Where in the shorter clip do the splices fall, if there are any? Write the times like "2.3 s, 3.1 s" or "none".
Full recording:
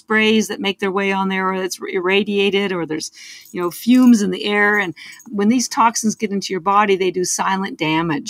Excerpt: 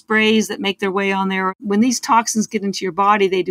1.5 s